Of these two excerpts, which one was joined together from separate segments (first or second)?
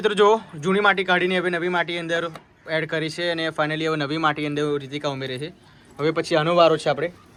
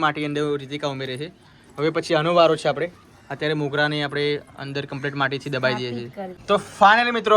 second